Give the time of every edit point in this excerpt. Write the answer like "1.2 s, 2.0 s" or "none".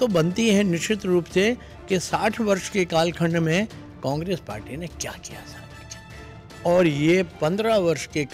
none